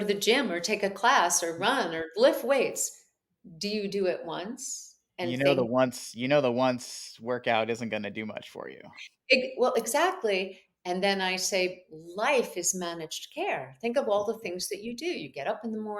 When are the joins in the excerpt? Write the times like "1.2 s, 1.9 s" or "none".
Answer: none

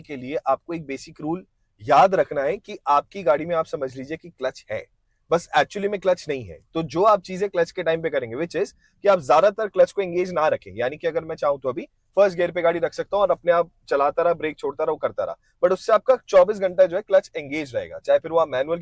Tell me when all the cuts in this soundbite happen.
none

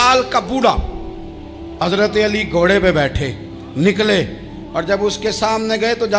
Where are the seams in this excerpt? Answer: 1.8 s

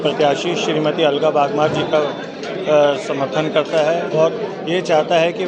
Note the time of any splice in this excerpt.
none

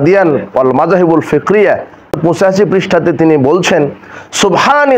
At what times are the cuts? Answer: 2.2 s

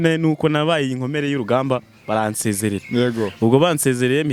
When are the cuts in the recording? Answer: none

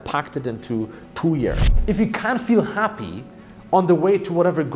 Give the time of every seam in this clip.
1.7 s

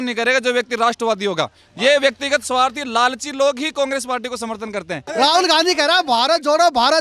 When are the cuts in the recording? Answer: 5.0 s

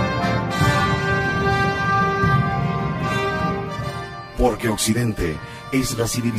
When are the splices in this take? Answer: 3.4 s

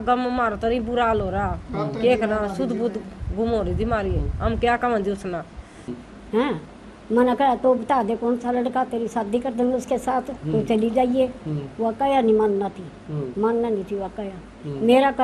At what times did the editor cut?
6.0 s

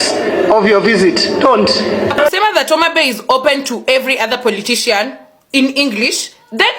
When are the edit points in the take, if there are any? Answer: 2.3 s

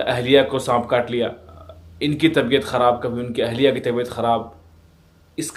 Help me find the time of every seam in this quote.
none

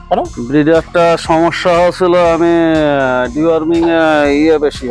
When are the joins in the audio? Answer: none

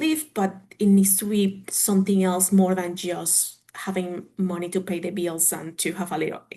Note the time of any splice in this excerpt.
none

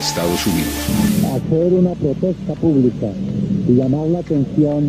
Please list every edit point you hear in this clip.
3.8 s

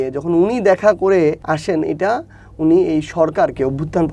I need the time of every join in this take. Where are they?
1.4 s

